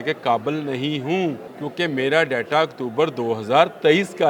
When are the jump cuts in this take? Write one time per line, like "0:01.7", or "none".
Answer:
0:01.5